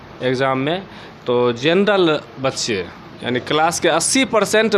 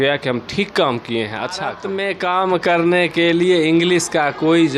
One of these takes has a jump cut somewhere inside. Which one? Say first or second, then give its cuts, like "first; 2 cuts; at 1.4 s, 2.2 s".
second; 1 cut; at 1.8 s